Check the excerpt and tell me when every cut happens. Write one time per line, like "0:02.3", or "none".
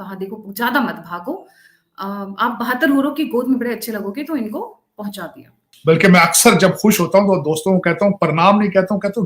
0:05.5